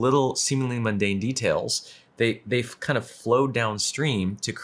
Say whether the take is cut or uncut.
uncut